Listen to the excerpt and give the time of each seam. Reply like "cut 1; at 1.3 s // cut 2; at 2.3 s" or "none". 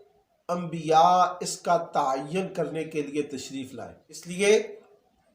cut 1; at 4.2 s